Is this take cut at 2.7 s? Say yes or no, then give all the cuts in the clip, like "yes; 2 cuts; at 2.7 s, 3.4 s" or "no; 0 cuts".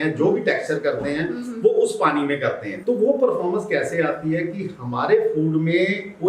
yes; 1 cut; at 2.7 s